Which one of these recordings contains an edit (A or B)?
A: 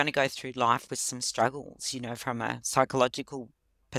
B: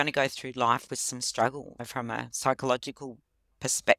B